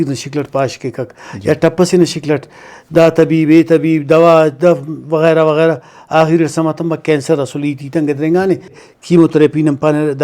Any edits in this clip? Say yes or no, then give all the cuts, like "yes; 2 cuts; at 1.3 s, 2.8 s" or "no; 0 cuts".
yes; 1 cut; at 8.8 s